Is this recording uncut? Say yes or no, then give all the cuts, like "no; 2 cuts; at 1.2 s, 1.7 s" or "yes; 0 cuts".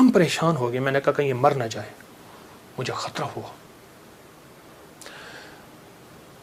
yes; 0 cuts